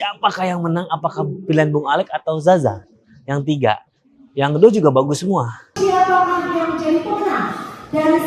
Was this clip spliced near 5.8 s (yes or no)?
yes